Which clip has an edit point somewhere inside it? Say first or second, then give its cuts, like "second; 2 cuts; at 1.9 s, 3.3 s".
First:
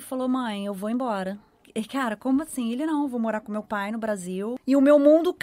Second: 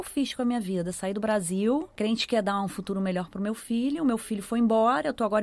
first; 2 cuts; at 1.6 s, 4.6 s